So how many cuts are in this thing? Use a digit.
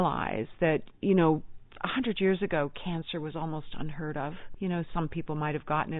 1